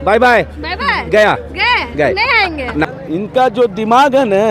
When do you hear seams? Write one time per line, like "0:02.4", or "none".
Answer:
0:03.0